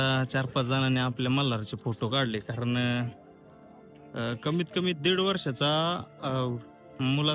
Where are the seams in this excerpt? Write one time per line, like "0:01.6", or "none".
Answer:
none